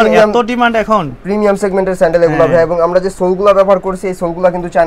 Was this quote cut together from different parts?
no; 0 cuts

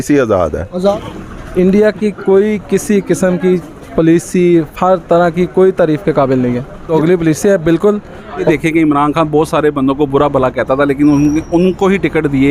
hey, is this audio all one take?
no; 3 cuts; at 0.9 s, 6.7 s, 8.4 s

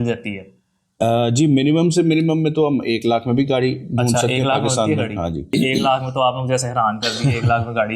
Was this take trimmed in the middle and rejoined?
yes; 1 cut; at 5.5 s

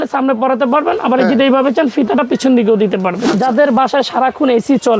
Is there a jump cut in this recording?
yes; 1 cut; at 3.2 s

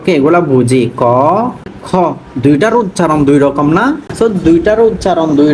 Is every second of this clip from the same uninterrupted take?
no; 2 cuts; at 1.6 s, 4.1 s

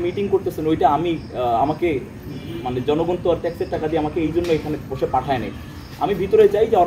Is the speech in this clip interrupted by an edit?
no; 0 cuts

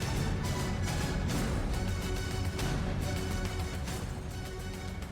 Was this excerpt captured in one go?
no; 1 cut; at 2.2 s

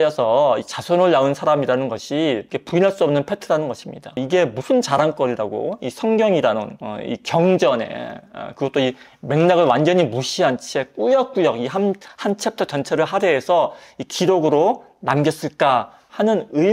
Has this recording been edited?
no; 0 cuts

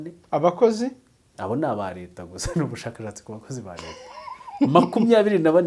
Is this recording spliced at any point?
no; 0 cuts

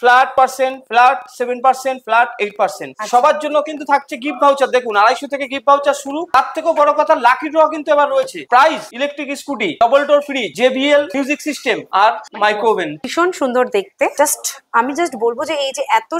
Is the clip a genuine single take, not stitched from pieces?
no; 5 cuts; at 2.9 s, 6.1 s, 8.4 s, 13.0 s, 14.1 s

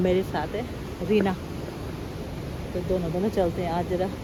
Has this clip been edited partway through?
no; 0 cuts

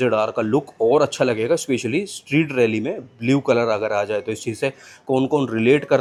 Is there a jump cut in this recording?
no; 0 cuts

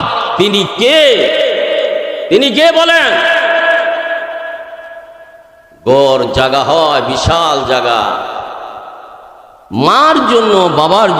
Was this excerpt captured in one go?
yes; 0 cuts

